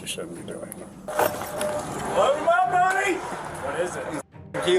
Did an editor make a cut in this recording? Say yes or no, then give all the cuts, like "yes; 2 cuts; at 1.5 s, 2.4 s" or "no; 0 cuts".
yes; 1 cut; at 1.1 s